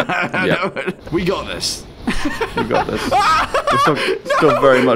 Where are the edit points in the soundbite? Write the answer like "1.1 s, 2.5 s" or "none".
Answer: 1.0 s

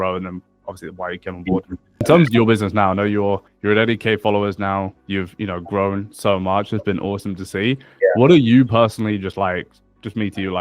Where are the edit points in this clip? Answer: 2.0 s

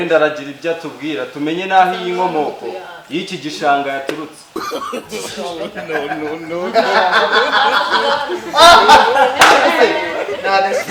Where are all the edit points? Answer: none

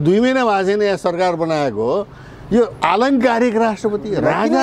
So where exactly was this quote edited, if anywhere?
none

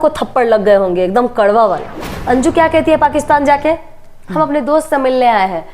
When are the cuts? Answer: 2.1 s

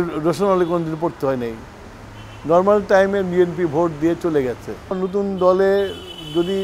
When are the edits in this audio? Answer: 4.9 s

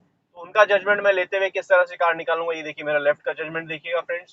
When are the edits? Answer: none

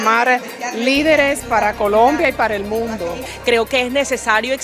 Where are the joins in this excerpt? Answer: 3.1 s

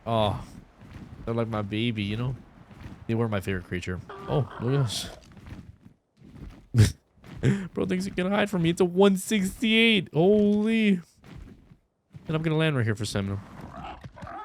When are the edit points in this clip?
4.1 s

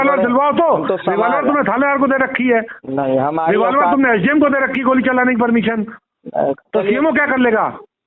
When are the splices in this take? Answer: none

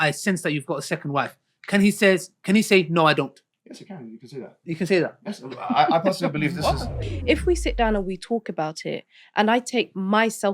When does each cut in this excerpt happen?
7.1 s

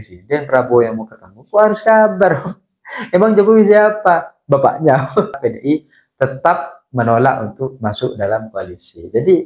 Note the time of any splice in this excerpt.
5.4 s

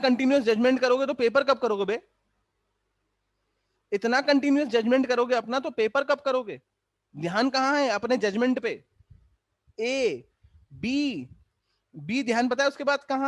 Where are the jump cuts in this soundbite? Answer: none

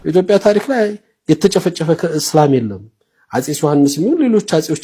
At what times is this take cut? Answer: none

